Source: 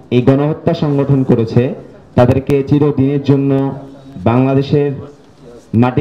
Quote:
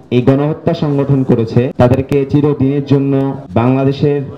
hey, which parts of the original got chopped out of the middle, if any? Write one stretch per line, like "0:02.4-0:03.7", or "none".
0:01.7-0:02.1
0:03.8-0:04.1